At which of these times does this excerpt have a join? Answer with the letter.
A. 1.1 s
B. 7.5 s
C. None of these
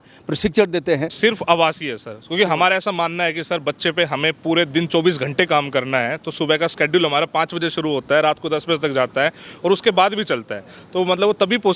A